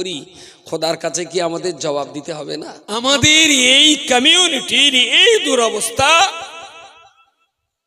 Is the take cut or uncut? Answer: cut